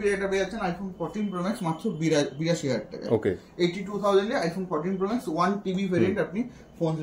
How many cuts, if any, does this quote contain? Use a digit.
0